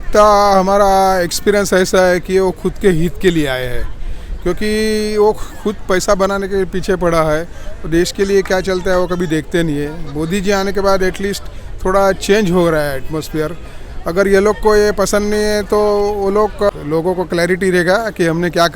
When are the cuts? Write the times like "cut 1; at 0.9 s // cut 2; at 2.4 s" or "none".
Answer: cut 1; at 16.7 s